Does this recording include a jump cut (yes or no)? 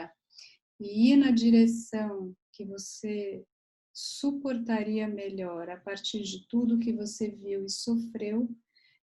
no